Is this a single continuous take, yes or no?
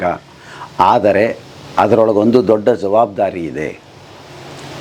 yes